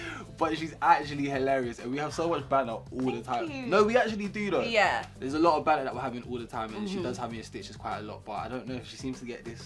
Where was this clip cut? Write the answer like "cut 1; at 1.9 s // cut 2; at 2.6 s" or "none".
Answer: none